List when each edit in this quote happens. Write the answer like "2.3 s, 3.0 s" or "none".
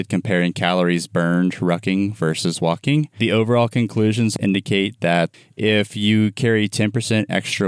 3.2 s, 4.3 s, 5.4 s